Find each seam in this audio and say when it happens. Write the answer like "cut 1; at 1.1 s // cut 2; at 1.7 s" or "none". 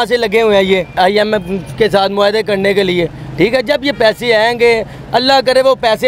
cut 1; at 1.0 s